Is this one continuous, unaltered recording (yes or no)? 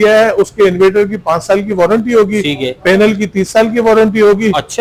yes